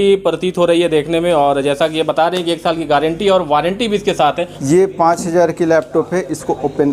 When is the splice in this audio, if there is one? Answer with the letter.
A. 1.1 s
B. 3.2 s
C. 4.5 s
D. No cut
C